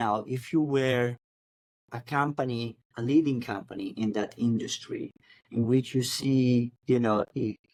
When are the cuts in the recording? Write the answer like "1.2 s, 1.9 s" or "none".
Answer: none